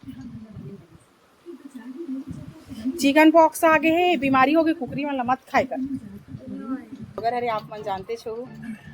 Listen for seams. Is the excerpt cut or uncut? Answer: cut